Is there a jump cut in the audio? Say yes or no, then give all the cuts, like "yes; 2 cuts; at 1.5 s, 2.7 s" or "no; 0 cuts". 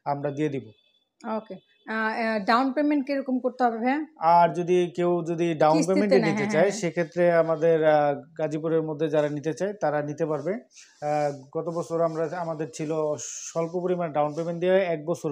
no; 0 cuts